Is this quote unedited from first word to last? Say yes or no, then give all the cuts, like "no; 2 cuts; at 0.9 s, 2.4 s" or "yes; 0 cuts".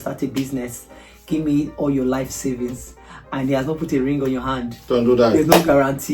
yes; 0 cuts